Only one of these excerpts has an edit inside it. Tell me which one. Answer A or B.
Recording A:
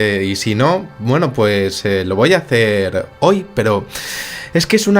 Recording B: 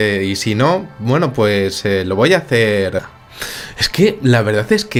A